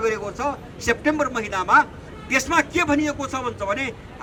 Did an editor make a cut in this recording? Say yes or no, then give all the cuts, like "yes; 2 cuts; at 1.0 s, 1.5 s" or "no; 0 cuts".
no; 0 cuts